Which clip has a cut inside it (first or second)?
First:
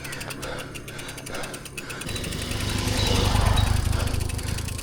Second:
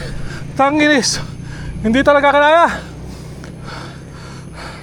first